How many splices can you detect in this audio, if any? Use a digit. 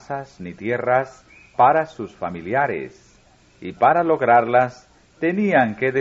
1